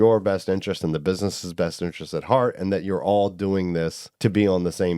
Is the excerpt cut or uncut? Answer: cut